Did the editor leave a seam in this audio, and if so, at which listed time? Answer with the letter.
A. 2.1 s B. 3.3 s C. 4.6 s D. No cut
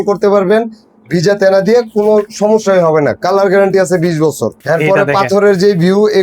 C